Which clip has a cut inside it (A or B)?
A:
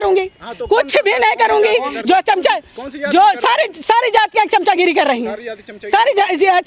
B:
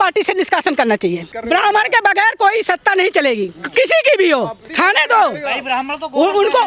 B